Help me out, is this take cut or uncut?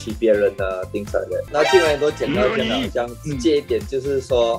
cut